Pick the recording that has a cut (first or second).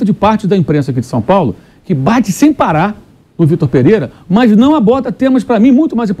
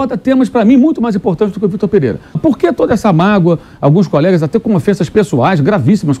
second